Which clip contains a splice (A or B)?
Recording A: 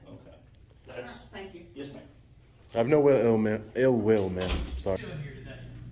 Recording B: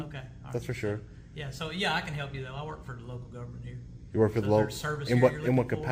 A